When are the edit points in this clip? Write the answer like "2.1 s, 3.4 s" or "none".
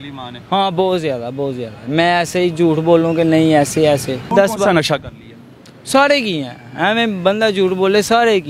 4.3 s